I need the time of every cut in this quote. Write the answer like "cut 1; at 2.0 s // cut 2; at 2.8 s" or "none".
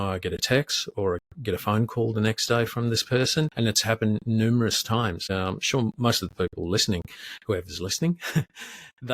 cut 1; at 3.5 s // cut 2; at 5.2 s